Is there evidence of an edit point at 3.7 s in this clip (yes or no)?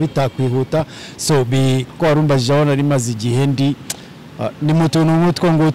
no